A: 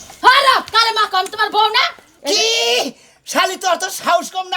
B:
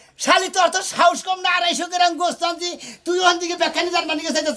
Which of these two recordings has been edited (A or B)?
A